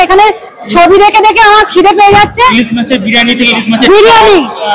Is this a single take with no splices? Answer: yes; 0 cuts

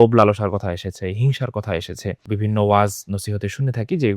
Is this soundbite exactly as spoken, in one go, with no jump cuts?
no; 1 cut; at 2.2 s

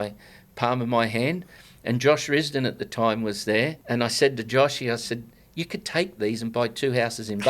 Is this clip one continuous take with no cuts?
no; 1 cut; at 3.8 s

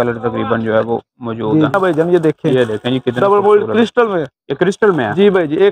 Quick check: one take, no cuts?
no; 1 cut; at 1.7 s

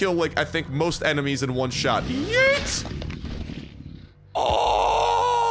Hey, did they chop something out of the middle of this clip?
no; 0 cuts

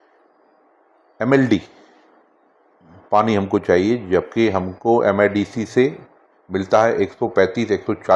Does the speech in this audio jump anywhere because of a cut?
no; 0 cuts

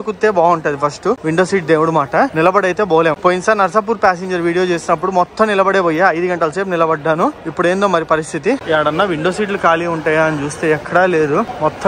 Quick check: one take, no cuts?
yes; 0 cuts

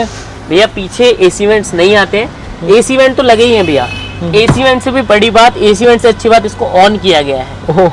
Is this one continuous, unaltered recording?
yes; 0 cuts

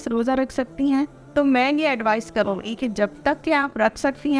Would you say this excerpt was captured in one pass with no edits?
yes; 0 cuts

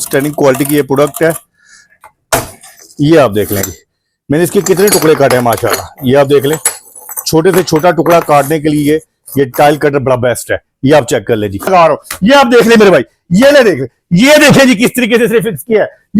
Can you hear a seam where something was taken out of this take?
yes; 1 cut; at 11.7 s

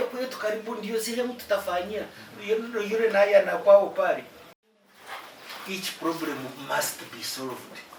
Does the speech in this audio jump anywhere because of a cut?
yes; 1 cut; at 4.8 s

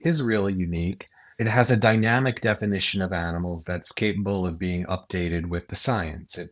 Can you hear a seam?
yes; 1 cut; at 1.4 s

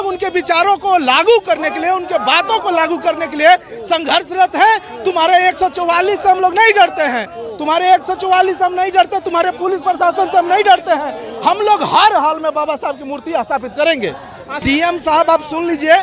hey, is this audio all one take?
no; 1 cut; at 14.5 s

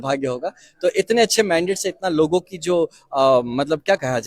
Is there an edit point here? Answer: no; 0 cuts

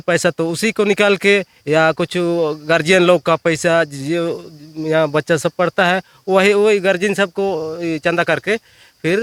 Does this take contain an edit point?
no; 0 cuts

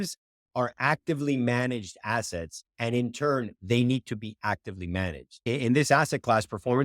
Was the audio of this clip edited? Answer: yes; 1 cut; at 5.4 s

